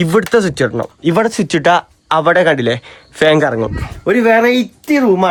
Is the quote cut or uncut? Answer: uncut